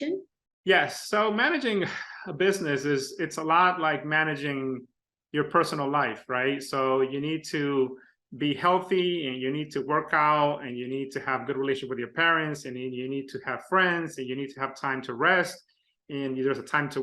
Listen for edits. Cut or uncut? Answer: uncut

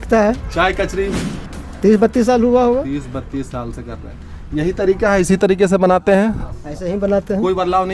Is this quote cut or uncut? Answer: cut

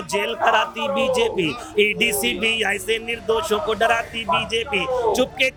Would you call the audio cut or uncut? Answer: uncut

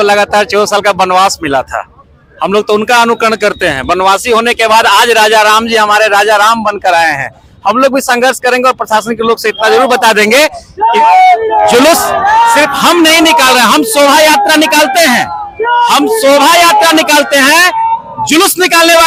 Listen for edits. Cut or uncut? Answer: uncut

